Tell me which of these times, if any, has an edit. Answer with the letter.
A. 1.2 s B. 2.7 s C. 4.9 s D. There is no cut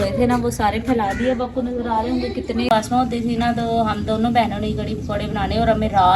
B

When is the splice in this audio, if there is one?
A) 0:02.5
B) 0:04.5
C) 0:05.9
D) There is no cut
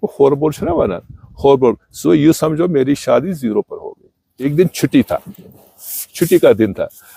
B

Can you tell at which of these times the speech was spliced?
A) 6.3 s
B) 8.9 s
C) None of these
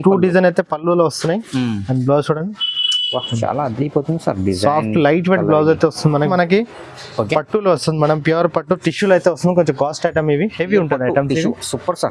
A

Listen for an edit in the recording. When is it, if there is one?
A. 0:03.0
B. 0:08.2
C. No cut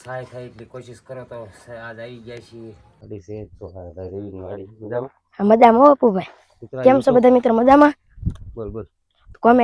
A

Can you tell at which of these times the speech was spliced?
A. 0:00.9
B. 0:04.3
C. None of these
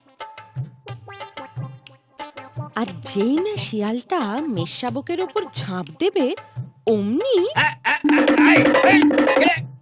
C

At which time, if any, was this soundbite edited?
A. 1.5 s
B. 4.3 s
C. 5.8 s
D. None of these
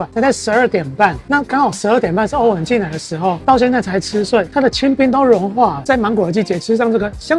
C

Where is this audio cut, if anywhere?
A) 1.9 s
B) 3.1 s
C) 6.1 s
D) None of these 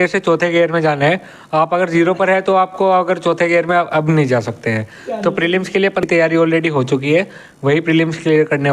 C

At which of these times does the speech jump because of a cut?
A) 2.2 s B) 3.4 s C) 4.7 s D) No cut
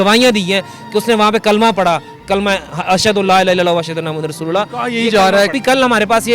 D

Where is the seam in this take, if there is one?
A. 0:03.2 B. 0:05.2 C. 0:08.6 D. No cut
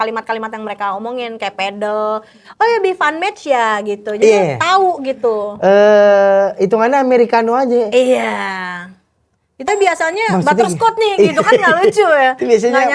D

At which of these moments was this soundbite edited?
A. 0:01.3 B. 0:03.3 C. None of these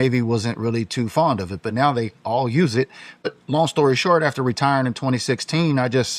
B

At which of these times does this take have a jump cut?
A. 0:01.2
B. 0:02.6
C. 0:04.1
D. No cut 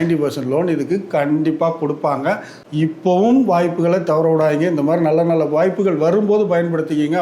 B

